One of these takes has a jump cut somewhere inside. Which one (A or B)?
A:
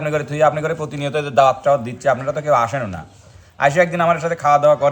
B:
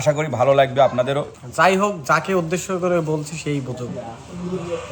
B